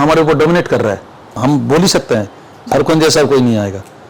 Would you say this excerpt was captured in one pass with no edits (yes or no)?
no